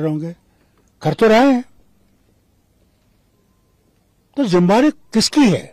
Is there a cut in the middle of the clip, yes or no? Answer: no